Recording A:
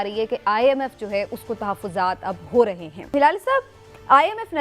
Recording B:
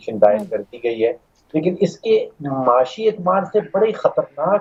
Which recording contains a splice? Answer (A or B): A